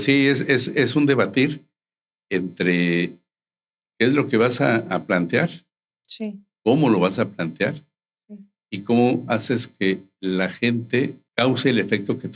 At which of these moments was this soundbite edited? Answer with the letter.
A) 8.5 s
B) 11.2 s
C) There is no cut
B